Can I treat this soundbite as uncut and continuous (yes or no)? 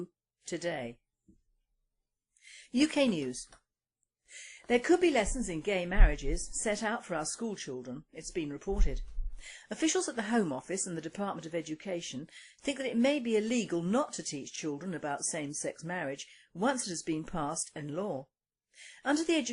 yes